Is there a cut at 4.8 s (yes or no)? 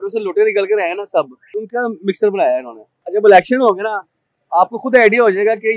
no